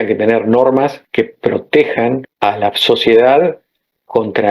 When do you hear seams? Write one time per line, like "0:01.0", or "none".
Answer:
0:01.0
0:02.3